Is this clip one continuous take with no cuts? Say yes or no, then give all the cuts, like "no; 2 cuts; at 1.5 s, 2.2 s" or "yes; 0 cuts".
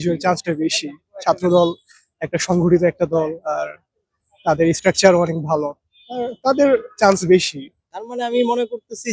no; 1 cut; at 7.9 s